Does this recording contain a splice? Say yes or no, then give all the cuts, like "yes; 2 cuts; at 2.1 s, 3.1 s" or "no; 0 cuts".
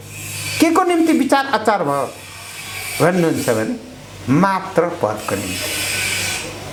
no; 0 cuts